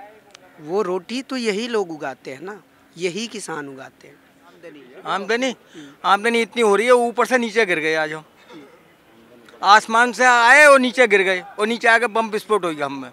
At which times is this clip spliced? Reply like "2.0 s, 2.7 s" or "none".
4.9 s